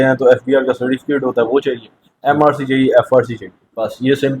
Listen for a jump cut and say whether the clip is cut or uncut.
uncut